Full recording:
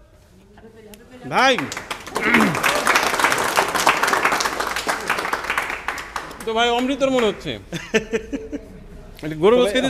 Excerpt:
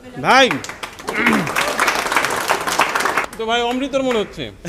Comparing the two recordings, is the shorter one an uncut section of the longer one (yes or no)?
no